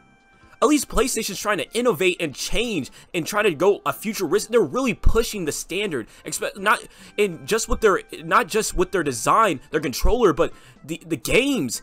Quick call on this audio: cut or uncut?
uncut